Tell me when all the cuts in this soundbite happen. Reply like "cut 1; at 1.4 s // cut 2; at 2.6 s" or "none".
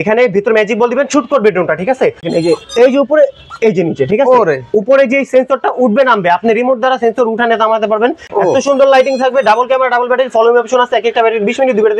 cut 1; at 2.3 s // cut 2; at 8.2 s